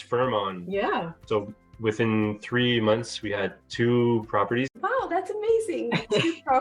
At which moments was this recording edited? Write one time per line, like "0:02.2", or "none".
0:01.2
0:04.7